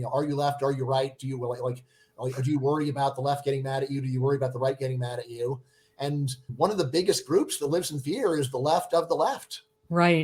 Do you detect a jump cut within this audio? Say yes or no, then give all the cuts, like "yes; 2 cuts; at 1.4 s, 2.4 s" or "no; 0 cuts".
no; 0 cuts